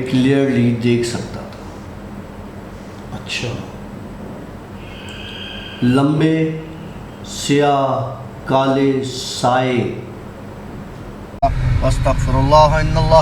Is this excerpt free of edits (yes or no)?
no